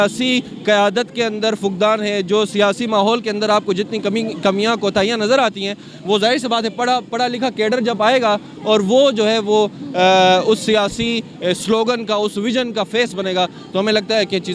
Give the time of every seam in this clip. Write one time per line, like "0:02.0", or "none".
none